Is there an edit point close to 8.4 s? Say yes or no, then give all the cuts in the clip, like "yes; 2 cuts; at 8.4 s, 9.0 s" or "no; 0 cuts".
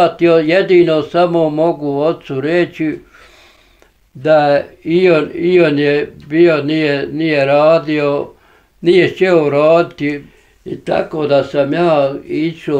no; 1 cut; at 10.3 s